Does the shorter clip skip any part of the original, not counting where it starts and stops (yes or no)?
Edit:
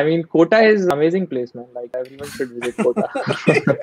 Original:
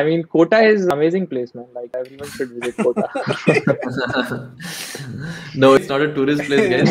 no